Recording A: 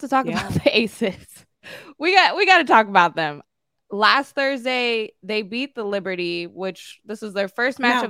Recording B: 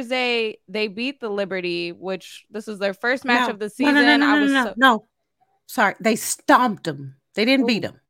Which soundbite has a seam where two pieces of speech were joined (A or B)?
A